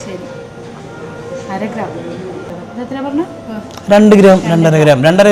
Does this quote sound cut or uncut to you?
cut